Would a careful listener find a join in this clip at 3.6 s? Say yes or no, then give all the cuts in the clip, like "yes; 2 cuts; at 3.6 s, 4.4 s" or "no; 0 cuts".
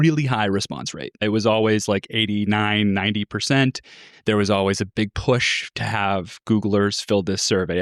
no; 2 cuts; at 1.2 s, 4.9 s